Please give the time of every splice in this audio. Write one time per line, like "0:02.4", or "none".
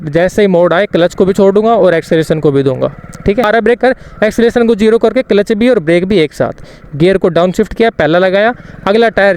0:03.5